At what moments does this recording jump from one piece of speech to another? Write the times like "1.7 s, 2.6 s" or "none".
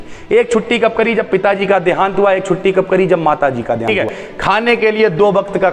4.0 s